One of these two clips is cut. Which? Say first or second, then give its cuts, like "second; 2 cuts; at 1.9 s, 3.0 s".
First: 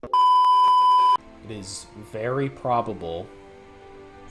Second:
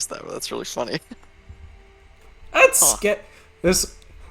first; 1 cut; at 1.4 s